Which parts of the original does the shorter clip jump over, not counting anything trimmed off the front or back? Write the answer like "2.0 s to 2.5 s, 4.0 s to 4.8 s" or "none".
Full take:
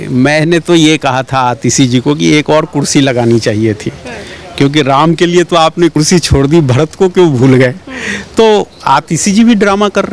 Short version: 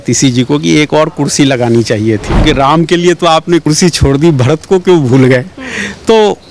4.0 s to 4.7 s